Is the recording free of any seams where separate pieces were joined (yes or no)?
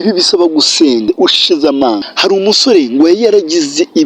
no